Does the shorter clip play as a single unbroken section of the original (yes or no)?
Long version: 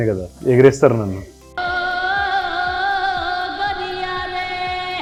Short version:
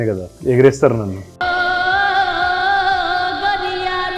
no